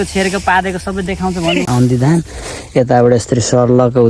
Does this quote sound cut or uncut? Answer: cut